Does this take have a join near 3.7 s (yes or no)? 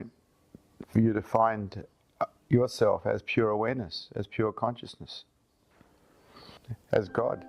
no